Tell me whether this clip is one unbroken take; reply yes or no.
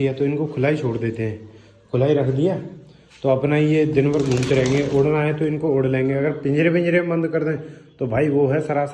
yes